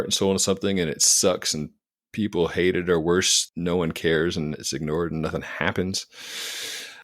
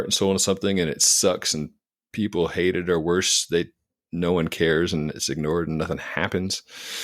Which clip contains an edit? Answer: first; 1 cut; at 3.4 s

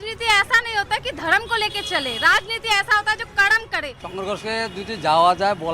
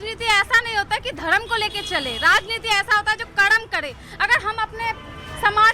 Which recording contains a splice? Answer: first; 1 cut; at 4.0 s

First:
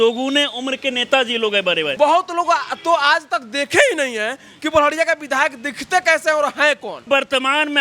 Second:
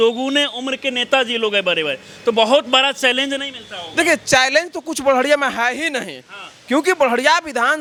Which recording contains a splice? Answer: first; 2 cuts; at 1.9 s, 7.1 s

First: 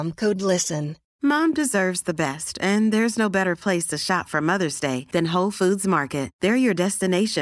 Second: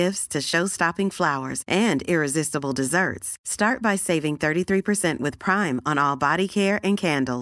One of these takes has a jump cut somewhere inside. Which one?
first; 1 cut; at 1.0 s

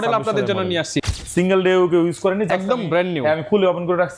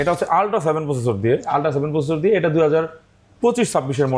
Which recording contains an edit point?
first; 1 cut; at 1.0 s

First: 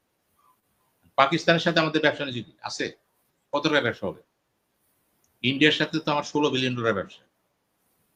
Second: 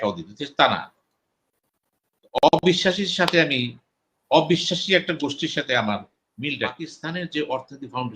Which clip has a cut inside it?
second; 1 cut; at 7.0 s

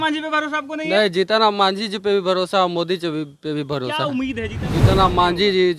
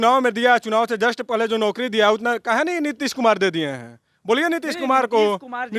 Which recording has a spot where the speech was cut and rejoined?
first; 1 cut; at 4.6 s

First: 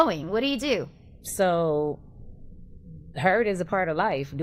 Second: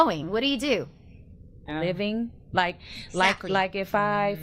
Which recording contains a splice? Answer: second; 1 cut; at 1.4 s

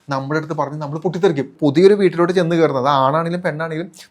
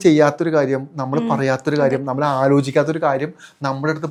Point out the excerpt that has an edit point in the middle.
first; 1 cut; at 1.5 s

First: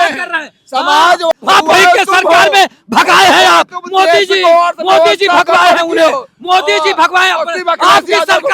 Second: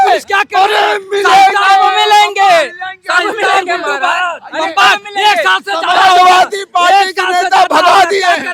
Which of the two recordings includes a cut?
first; 1 cut; at 1.3 s

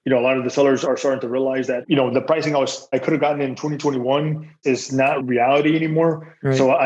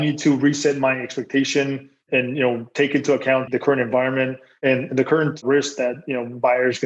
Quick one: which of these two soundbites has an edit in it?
first; 1 cut; at 1.8 s

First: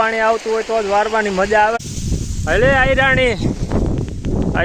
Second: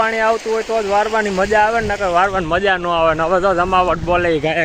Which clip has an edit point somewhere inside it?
first; 1 cut; at 2.0 s

